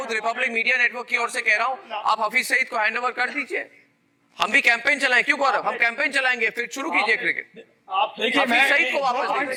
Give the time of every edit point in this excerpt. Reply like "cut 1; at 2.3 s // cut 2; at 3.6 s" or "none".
none